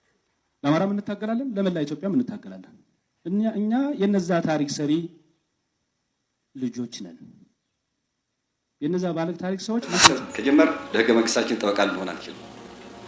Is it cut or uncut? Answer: cut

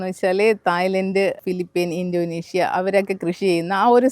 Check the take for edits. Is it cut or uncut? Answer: cut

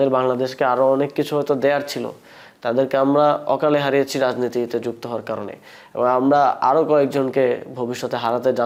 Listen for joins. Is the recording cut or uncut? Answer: uncut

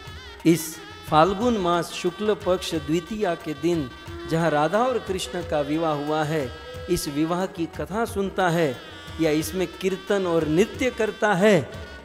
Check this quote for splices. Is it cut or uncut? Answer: uncut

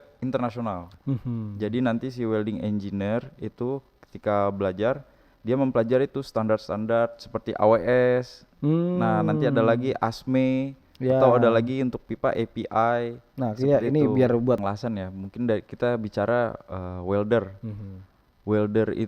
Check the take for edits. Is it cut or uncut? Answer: cut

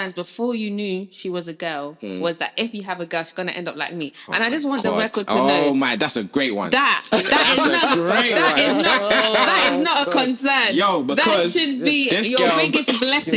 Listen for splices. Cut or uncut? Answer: uncut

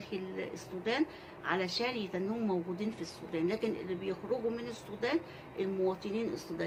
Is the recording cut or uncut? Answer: uncut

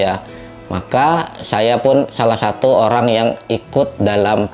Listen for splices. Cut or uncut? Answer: uncut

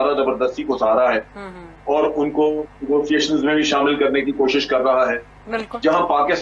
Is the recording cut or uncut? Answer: uncut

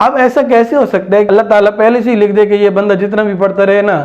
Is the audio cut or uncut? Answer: cut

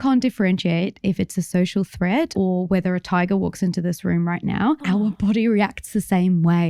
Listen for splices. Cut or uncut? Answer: cut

